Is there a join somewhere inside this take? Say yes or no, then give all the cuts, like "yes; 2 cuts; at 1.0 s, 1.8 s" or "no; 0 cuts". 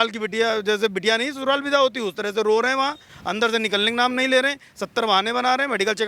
no; 0 cuts